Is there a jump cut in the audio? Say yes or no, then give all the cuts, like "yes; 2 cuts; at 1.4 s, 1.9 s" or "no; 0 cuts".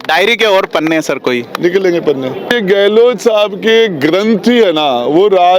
yes; 1 cut; at 2.5 s